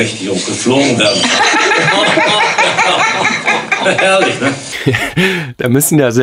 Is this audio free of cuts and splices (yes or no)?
no